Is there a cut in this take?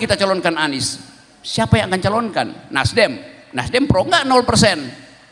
no; 0 cuts

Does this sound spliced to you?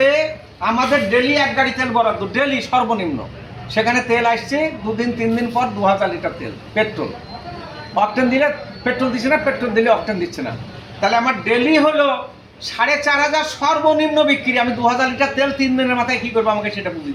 no; 0 cuts

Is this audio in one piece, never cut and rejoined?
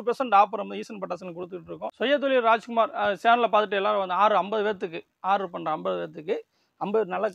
no; 1 cut; at 1.9 s

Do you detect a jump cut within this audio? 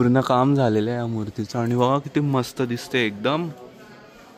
no; 0 cuts

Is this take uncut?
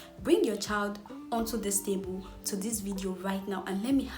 yes; 0 cuts

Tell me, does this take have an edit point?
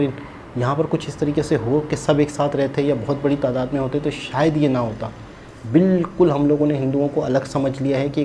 no; 0 cuts

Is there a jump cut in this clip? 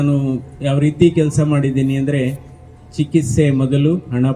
no; 0 cuts

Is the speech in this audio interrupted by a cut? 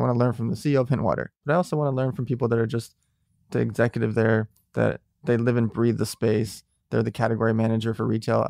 yes; 1 cut; at 1.3 s

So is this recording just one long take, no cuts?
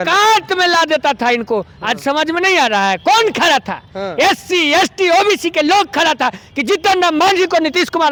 yes; 0 cuts

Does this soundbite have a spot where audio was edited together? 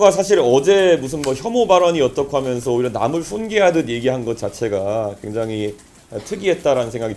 no; 0 cuts

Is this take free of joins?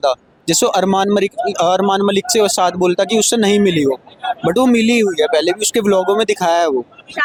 yes; 0 cuts

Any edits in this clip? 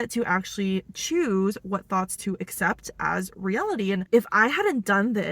yes; 1 cut; at 4.0 s

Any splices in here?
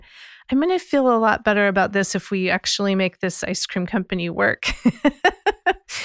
no; 0 cuts

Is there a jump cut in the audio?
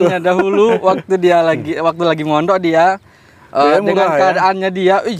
no; 0 cuts

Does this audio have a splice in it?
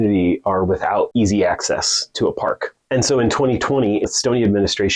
yes; 3 cuts; at 1.1 s, 2.7 s, 4.1 s

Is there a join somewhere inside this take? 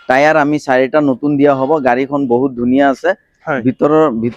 no; 0 cuts

